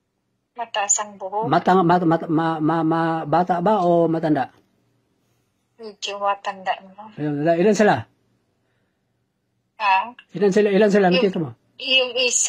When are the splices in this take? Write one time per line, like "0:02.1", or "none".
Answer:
none